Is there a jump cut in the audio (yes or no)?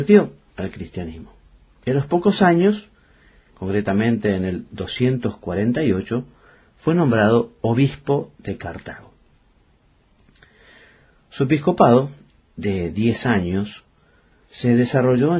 no